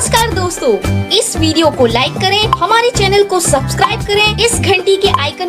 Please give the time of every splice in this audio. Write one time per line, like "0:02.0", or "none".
none